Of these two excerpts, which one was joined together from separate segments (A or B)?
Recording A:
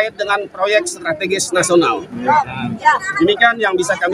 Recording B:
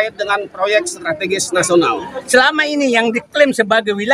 B